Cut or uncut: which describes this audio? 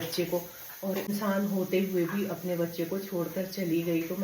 cut